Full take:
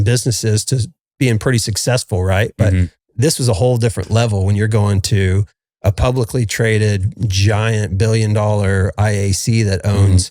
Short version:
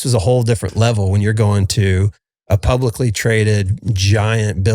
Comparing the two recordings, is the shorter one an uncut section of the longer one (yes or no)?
yes